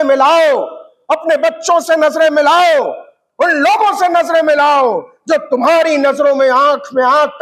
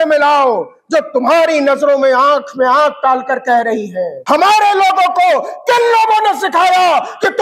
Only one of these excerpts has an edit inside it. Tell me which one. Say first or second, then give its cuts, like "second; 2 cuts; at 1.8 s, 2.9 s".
second; 1 cut; at 4.2 s